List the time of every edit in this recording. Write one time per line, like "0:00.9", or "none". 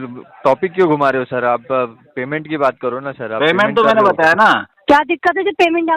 0:04.7